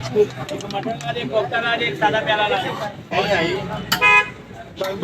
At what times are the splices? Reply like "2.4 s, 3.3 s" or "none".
3.1 s